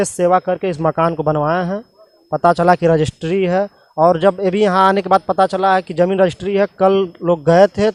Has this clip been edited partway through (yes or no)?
no